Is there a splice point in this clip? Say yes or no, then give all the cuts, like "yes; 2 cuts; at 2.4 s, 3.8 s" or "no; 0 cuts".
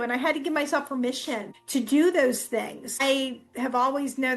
yes; 2 cuts; at 1.5 s, 3.0 s